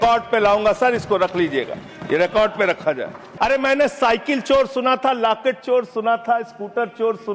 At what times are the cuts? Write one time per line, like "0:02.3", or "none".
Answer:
0:03.2